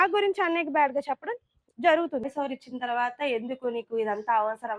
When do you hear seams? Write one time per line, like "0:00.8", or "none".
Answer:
0:02.3